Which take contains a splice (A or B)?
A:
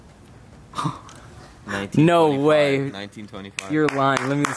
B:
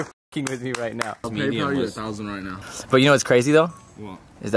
B